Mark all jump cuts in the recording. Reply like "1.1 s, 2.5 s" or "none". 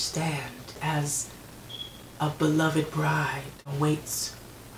0.8 s, 3.7 s